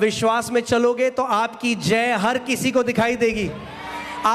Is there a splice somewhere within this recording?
no; 0 cuts

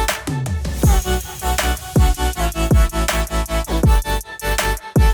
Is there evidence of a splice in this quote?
no; 0 cuts

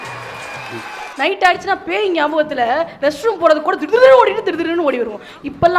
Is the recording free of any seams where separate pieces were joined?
no; 1 cut; at 1.1 s

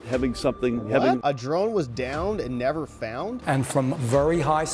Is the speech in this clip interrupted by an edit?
yes; 2 cuts; at 1.2 s, 3.4 s

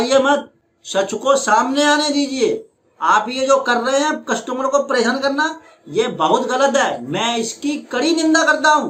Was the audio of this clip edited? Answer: no; 0 cuts

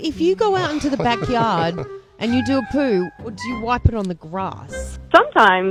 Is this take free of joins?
yes; 0 cuts

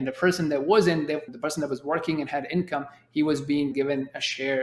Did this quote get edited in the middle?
yes; 2 cuts; at 1.3 s, 3.7 s

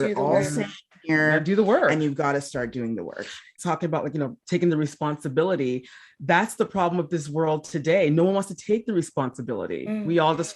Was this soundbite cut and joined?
yes; 1 cut; at 3.6 s

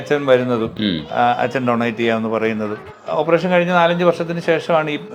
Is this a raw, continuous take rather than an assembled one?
no; 1 cut; at 2.9 s

